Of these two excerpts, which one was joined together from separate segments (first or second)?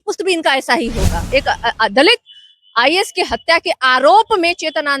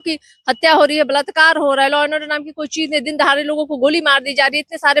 first